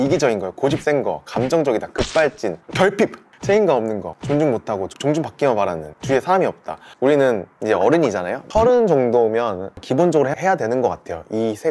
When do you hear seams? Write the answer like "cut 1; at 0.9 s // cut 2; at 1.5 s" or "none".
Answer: cut 1; at 3.2 s // cut 2; at 4.1 s // cut 3; at 5.9 s // cut 4; at 6.8 s // cut 5; at 7.5 s